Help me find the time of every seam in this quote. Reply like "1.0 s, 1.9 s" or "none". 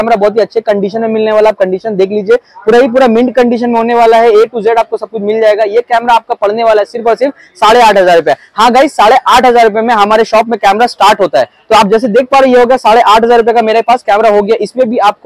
none